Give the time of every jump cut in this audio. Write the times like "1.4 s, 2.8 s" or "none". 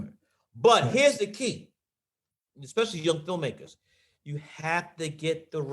2.2 s, 4.1 s